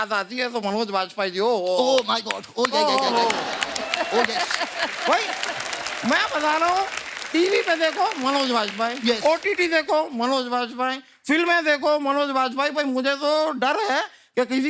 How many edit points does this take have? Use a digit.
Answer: 0